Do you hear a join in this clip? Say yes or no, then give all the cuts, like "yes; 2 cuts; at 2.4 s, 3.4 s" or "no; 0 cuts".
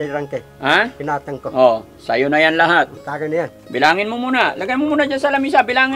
no; 0 cuts